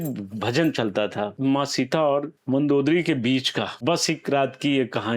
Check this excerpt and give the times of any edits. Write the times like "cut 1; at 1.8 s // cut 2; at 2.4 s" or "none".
cut 1; at 1.3 s // cut 2; at 2.4 s // cut 3; at 3.7 s